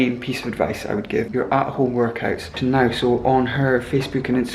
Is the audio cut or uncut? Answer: cut